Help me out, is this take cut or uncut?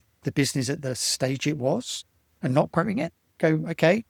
uncut